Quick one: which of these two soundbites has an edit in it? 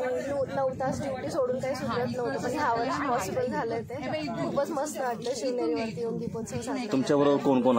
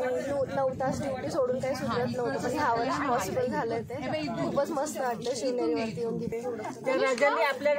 second; 1 cut; at 6.3 s

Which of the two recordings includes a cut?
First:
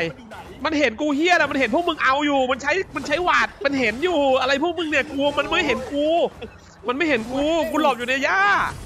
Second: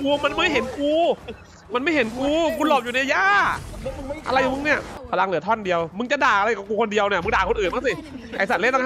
second; 1 cut; at 4.9 s

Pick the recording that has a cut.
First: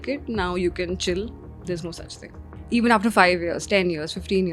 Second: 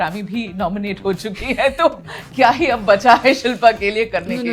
first; 1 cut; at 2.5 s

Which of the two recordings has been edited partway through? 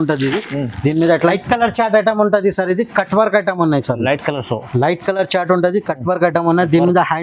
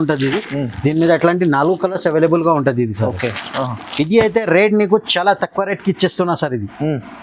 first; 1 cut; at 1.3 s

